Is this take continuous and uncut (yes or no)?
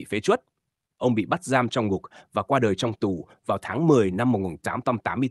yes